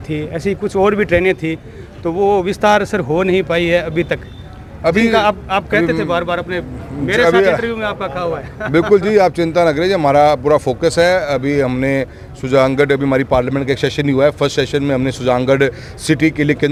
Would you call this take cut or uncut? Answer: uncut